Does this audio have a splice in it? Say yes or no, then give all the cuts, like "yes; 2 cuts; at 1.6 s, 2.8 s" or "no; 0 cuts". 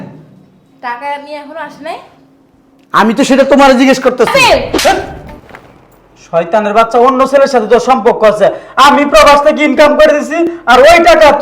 yes; 1 cut; at 4.3 s